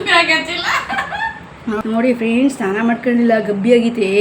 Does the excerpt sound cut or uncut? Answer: cut